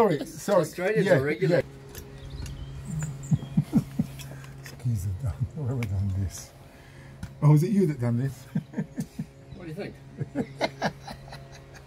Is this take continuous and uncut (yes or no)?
no